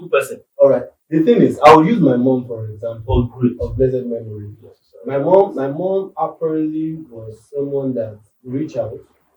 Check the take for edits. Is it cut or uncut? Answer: uncut